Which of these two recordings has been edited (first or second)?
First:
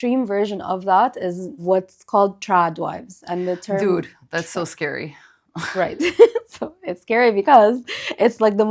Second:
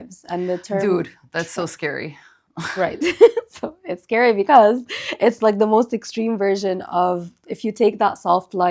first